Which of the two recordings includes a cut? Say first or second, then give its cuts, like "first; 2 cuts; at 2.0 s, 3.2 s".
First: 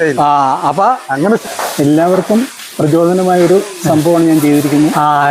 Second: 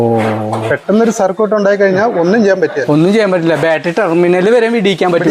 first; 1 cut; at 1.5 s